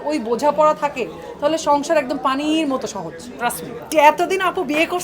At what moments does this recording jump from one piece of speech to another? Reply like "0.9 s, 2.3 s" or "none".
3.9 s